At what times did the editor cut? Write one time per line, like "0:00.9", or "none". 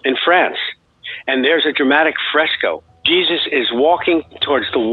0:01.7
0:02.9